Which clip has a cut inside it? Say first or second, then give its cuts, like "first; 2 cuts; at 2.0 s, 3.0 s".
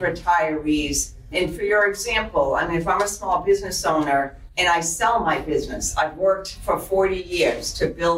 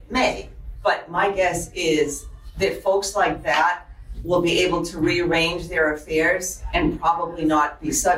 first; 2 cuts; at 1.3 s, 4.4 s